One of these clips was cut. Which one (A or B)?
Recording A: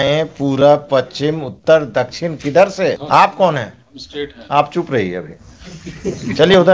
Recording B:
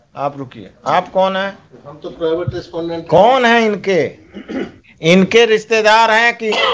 A